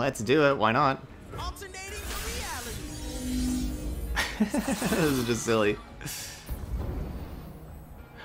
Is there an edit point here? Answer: yes; 1 cut; at 1.1 s

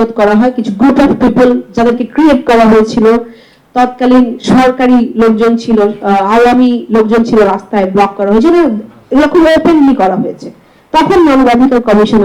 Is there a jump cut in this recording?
no; 0 cuts

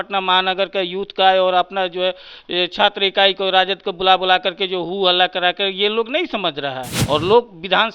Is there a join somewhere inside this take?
yes; 1 cut; at 6.9 s

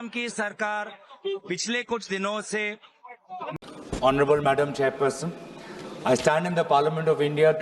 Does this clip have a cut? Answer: yes; 1 cut; at 3.6 s

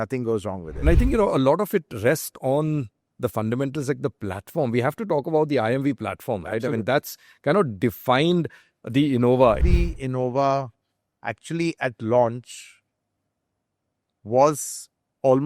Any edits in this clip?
yes; 2 cuts; at 0.8 s, 9.6 s

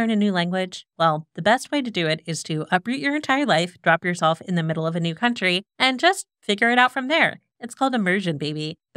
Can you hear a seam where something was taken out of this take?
no; 0 cuts

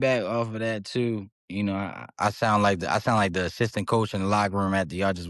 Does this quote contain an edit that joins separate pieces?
yes; 1 cut; at 1.4 s

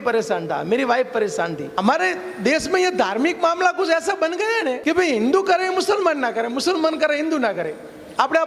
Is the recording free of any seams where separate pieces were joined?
no; 2 cuts; at 1.7 s, 4.8 s

